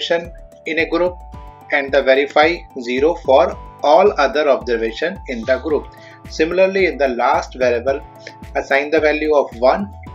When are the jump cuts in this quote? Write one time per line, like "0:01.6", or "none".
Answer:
none